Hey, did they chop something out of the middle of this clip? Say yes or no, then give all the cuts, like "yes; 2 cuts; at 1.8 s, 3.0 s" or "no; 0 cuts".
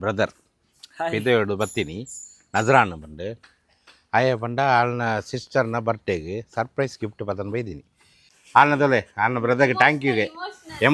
yes; 1 cut; at 8.4 s